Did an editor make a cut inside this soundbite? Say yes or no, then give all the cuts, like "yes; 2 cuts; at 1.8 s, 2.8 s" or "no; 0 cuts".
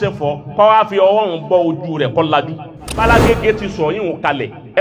yes; 1 cut; at 3.0 s